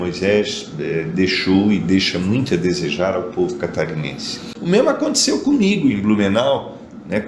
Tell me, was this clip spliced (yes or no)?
yes